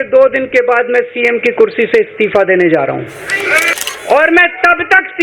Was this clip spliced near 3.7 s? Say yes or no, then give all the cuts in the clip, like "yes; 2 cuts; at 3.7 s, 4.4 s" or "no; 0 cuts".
yes; 1 cut; at 3.7 s